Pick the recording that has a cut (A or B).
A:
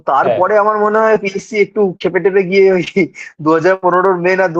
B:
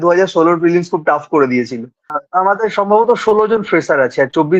B